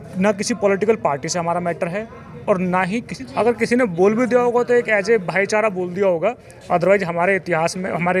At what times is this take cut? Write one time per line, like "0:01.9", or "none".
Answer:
0:03.2